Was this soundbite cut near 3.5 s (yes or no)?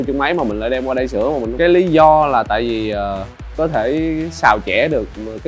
yes